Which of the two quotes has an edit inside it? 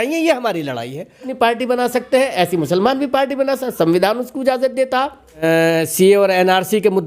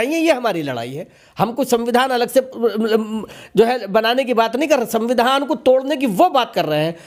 first; 2 cuts; at 1.3 s, 5.4 s

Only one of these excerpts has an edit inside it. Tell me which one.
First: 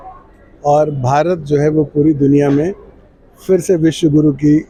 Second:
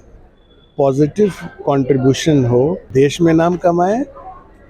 second; 1 cut; at 2.9 s

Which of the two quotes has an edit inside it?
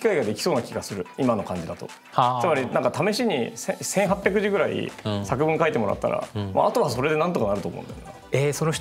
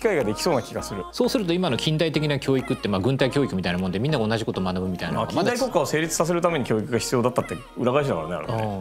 second; 1 cut; at 1.0 s

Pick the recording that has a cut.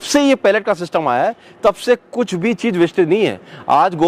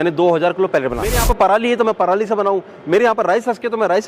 second; 1 cut; at 1.2 s

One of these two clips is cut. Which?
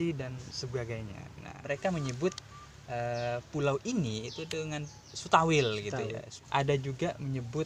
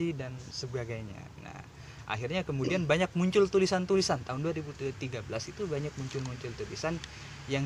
first; 2 cuts; at 1.6 s, 6.3 s

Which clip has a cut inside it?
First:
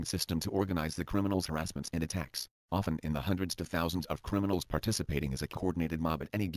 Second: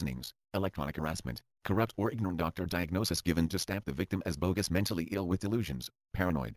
second; 1 cut; at 1.5 s

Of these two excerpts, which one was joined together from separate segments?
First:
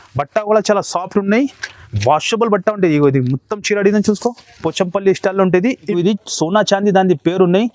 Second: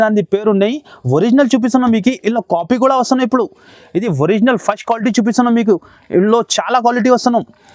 first; 1 cut; at 6.0 s

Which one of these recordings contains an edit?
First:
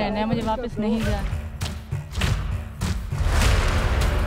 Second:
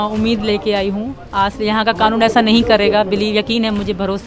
first; 1 cut; at 1.3 s

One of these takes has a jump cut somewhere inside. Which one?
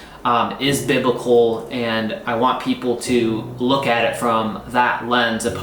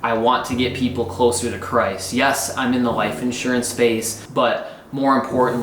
second; 1 cut; at 4.2 s

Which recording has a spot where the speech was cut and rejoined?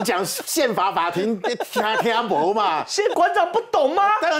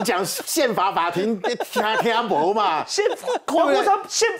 first; 1 cut; at 3.1 s

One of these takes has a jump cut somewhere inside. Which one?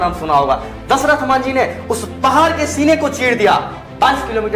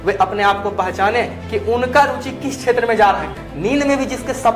second; 1 cut; at 3.3 s

